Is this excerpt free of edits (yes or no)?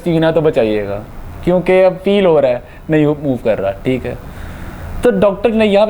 yes